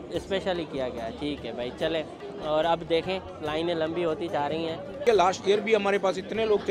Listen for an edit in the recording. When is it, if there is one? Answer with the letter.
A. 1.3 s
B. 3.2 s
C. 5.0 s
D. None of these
C